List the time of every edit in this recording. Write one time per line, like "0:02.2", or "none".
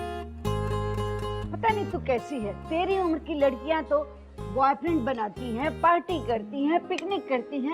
0:05.7